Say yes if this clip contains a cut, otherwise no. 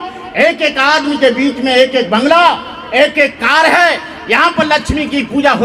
no